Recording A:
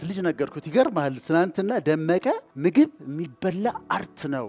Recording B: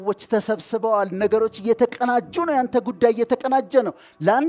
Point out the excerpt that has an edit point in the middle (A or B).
A